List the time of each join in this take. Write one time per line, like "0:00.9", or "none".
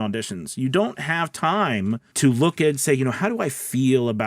0:02.1

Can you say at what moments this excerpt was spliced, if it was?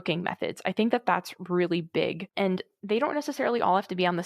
0:02.5

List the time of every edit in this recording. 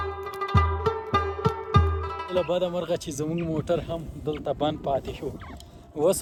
none

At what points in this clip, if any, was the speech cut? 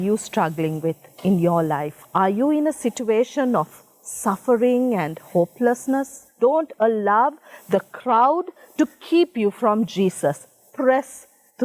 0:02.0
0:06.3

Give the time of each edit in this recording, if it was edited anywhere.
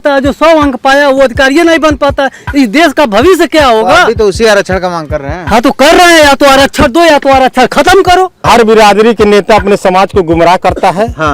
0:08.4

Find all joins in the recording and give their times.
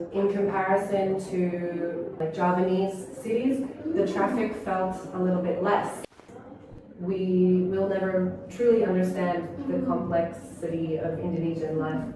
0:06.0

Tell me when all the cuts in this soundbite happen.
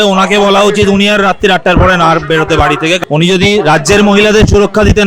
0:03.0

